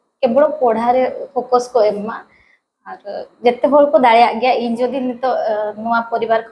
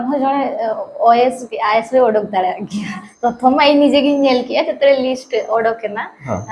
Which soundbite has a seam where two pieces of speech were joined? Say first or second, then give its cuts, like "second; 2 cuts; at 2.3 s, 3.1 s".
second; 1 cut; at 3.0 s